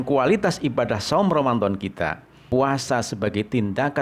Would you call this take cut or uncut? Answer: cut